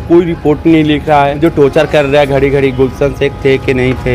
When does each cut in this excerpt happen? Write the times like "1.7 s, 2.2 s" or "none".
1.4 s